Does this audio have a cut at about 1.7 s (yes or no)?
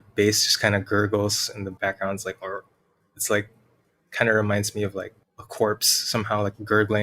yes